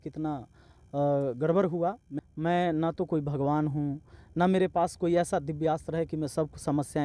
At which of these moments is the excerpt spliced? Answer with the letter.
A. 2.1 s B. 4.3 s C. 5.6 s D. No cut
A